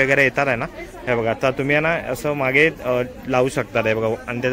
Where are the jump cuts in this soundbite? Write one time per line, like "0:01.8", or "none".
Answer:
none